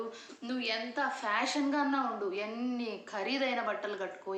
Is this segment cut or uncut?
uncut